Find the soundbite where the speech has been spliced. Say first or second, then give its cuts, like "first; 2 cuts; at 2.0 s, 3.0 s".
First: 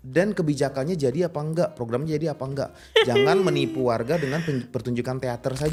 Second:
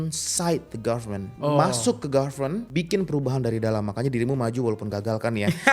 second; 2 cuts; at 1.3 s, 2.7 s